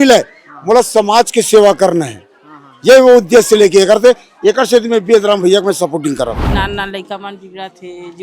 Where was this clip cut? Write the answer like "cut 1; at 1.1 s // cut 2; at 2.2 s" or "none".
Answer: cut 1; at 6.5 s